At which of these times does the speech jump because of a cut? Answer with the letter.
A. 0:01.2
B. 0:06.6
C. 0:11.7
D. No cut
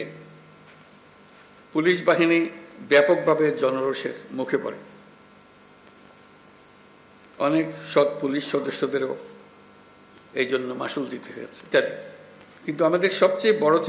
C